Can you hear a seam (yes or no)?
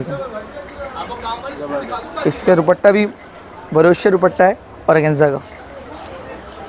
no